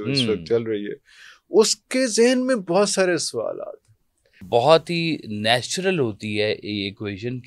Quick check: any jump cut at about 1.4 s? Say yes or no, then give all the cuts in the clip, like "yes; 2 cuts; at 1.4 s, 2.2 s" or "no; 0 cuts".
no; 1 cut; at 4.4 s